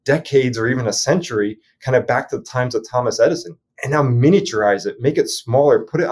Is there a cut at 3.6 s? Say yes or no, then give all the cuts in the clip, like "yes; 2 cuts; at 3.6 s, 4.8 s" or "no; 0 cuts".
yes; 1 cut; at 3.6 s